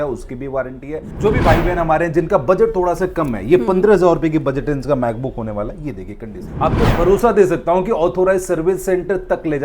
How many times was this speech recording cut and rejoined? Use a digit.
2